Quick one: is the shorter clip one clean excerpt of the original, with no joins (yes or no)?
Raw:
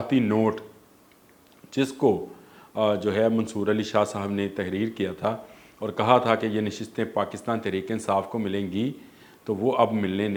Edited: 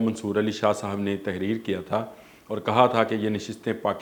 yes